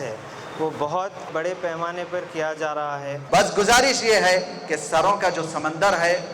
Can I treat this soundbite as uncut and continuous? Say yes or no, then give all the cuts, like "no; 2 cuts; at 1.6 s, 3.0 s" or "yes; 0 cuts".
no; 2 cuts; at 1.3 s, 3.2 s